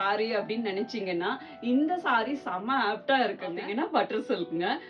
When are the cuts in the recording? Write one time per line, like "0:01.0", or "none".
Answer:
0:03.6